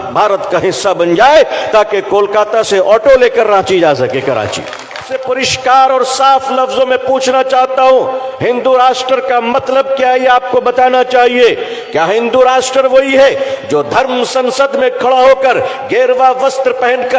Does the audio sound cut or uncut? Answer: cut